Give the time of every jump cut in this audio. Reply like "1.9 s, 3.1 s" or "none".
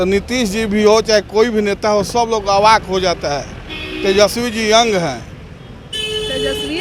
none